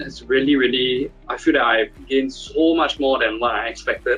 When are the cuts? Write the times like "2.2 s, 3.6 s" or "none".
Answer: 2.0 s